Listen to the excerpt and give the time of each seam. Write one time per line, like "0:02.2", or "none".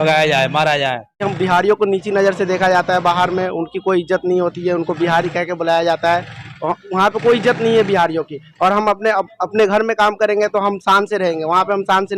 0:01.3

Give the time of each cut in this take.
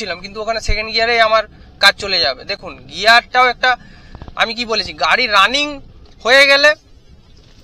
none

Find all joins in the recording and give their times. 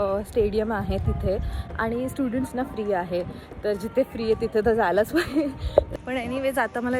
0:05.9

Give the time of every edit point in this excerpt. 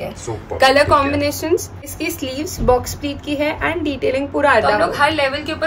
0:01.9
0:04.8

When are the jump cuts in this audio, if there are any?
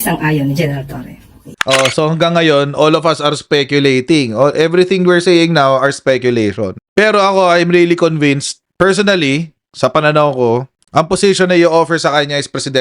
0:01.4

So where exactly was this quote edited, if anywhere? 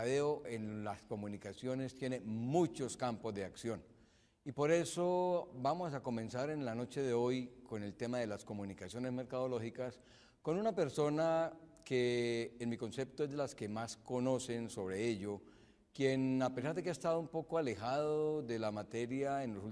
0:01.0

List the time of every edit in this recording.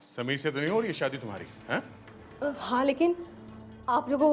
0:02.1

